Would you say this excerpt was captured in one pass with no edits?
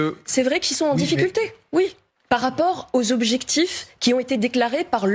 yes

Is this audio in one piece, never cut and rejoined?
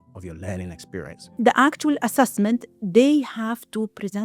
no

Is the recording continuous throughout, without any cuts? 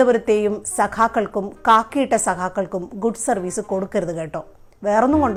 yes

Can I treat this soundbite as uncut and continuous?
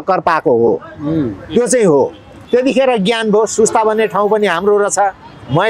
no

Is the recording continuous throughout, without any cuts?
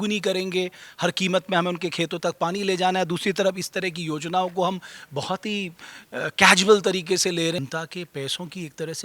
no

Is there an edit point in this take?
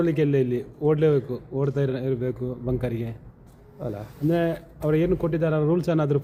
no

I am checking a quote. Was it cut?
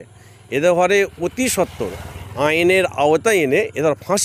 no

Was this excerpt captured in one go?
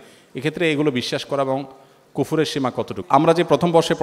no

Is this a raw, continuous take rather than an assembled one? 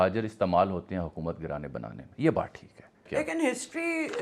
no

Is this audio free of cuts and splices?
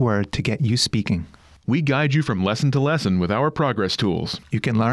yes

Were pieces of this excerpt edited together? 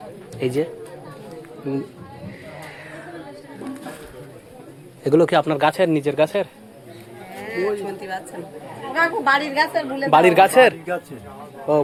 no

